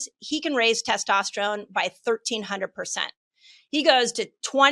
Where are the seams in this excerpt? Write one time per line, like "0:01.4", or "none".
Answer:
0:03.6